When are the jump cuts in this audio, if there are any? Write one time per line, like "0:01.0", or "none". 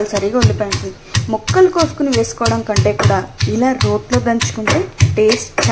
none